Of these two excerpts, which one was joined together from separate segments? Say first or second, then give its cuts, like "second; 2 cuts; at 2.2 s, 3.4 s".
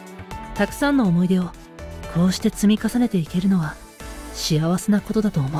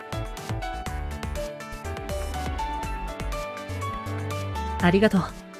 second; 2 cuts; at 0.9 s, 4.8 s